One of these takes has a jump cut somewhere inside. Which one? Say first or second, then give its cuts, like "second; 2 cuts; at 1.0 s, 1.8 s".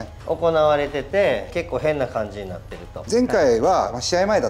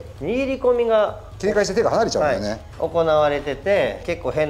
first; 1 cut; at 3.0 s